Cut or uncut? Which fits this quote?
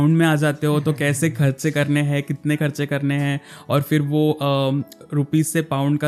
uncut